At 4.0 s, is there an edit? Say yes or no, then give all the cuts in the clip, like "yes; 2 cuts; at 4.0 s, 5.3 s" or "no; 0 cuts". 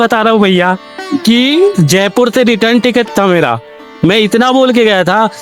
no; 0 cuts